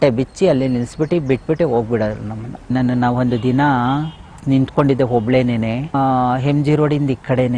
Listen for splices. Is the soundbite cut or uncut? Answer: cut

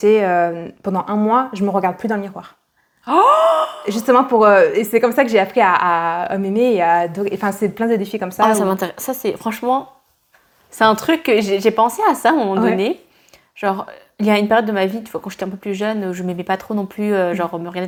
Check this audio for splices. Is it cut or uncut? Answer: uncut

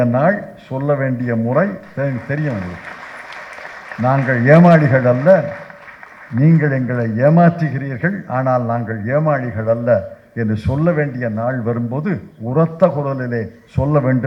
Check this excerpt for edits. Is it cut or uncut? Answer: uncut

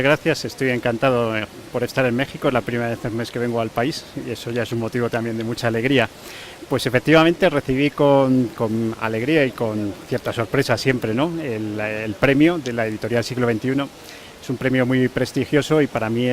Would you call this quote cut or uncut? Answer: cut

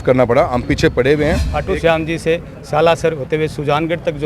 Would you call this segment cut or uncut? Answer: cut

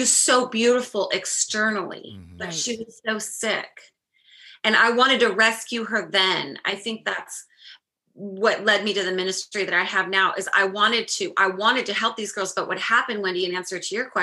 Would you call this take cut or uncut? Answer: uncut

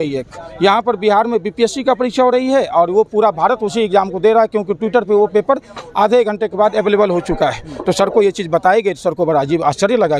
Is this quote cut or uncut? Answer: uncut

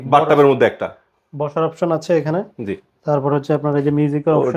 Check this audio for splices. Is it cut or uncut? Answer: uncut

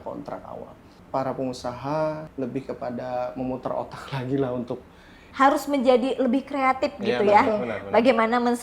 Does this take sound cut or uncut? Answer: cut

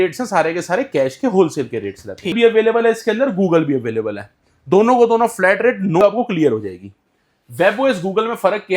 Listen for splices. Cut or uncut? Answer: cut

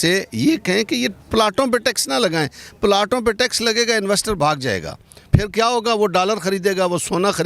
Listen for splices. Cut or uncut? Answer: uncut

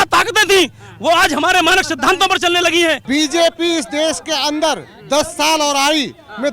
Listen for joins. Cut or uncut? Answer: cut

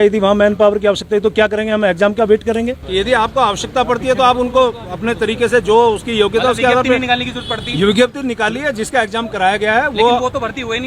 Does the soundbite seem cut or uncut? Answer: cut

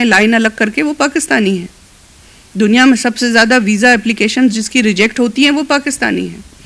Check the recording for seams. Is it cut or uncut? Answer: uncut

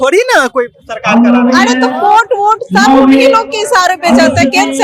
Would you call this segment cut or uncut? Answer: uncut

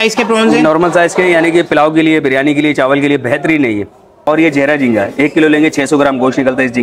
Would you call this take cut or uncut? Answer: cut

